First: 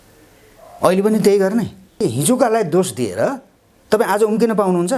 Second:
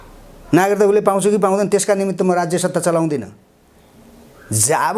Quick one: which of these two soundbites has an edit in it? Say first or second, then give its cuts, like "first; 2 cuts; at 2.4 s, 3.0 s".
first; 1 cut; at 2.0 s